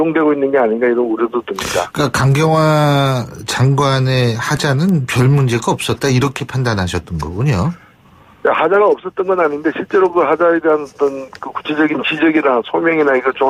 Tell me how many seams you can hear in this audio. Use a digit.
0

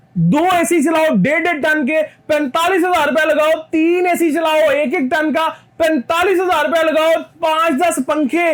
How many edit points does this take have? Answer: 0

